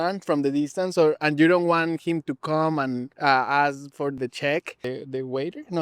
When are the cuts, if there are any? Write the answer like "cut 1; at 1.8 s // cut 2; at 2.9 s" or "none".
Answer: cut 1; at 3.1 s // cut 2; at 4.2 s // cut 3; at 4.8 s